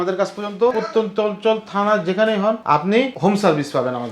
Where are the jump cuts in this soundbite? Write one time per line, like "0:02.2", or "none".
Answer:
0:00.7
0:03.0